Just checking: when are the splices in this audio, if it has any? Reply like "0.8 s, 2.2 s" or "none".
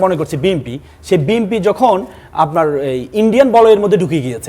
none